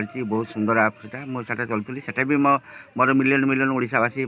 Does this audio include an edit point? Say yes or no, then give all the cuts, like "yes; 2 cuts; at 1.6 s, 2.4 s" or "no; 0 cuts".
no; 0 cuts